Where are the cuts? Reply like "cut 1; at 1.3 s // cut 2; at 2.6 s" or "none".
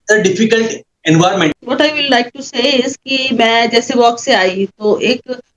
cut 1; at 1.5 s